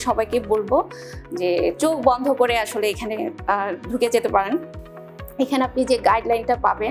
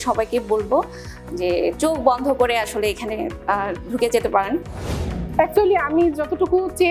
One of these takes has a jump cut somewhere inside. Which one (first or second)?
second